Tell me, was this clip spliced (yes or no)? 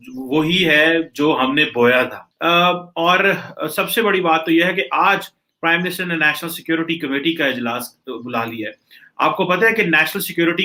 no